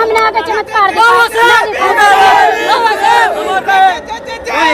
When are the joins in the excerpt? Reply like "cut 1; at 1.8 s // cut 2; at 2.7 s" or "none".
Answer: none